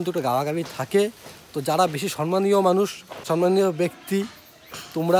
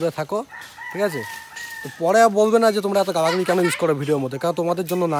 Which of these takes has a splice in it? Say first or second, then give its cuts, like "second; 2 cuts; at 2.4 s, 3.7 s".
first; 1 cut; at 3.2 s